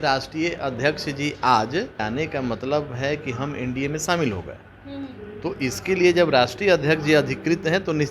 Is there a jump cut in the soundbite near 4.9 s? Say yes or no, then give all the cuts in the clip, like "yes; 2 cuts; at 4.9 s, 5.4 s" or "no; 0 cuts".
no; 1 cut; at 2.0 s